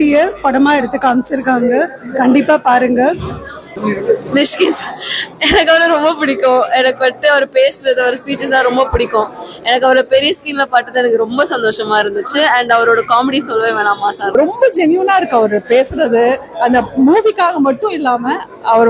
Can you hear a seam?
yes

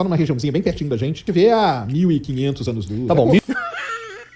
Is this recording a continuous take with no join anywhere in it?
no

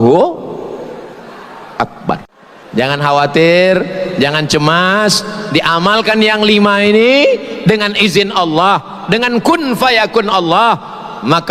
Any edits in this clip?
yes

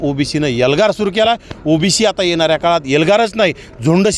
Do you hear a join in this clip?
no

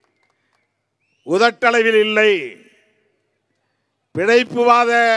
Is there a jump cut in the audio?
no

